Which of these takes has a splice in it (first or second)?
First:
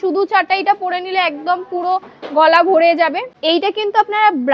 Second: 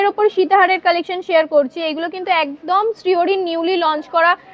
first